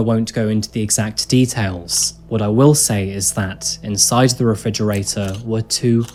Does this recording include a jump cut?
no; 0 cuts

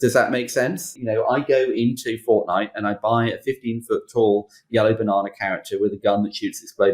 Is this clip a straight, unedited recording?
no; 1 cut; at 0.9 s

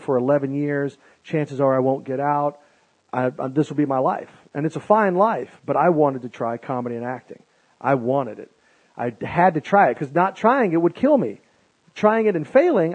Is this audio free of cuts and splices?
no; 1 cut; at 10.0 s

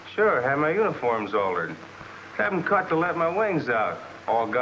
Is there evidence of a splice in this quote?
yes; 1 cut; at 1.0 s

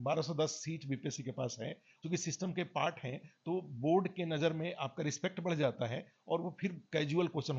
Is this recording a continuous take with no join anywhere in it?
no; 1 cut; at 1.9 s

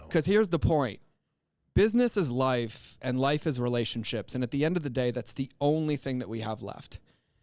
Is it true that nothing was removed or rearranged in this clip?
yes; 0 cuts

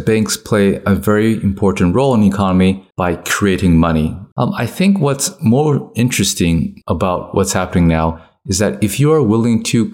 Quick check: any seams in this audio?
yes; 3 cuts; at 2.9 s, 4.2 s, 6.8 s

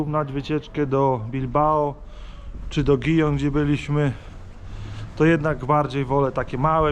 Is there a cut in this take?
no; 0 cuts

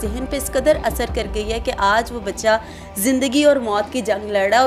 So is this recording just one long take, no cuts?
yes; 0 cuts

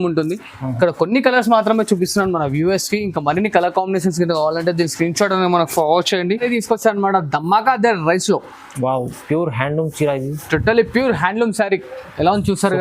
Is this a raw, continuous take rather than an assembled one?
no; 1 cut; at 6.4 s

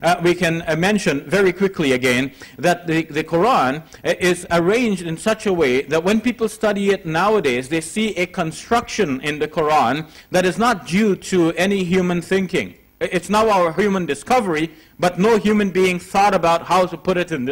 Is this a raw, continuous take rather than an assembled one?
no; 1 cut; at 13.7 s

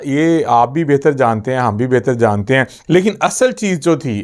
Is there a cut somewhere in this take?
yes; 1 cut; at 2.8 s

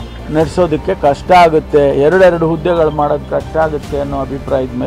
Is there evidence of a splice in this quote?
no; 0 cuts

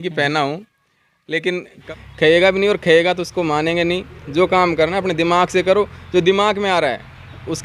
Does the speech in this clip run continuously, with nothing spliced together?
no; 1 cut; at 1.9 s

